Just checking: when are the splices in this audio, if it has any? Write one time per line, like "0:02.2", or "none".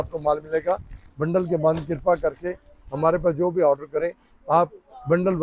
none